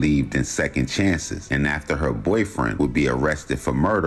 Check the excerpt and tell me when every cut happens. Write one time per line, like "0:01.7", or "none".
0:01.3
0:02.7